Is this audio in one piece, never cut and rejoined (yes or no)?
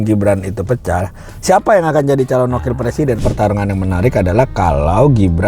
no